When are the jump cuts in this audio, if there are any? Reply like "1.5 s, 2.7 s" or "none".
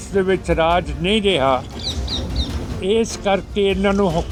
none